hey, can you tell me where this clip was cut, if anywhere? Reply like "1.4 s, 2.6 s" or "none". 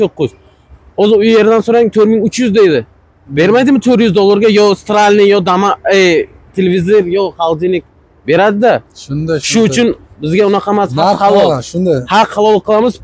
none